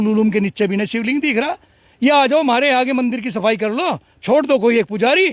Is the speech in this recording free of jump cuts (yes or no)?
yes